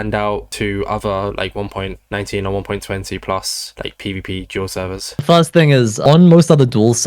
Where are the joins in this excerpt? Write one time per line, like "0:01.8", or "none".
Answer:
none